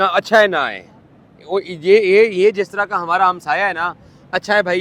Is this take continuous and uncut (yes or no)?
yes